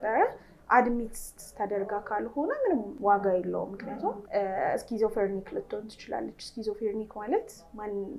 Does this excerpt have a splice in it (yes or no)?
yes